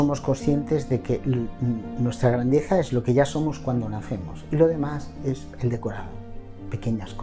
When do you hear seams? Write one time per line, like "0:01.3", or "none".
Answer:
none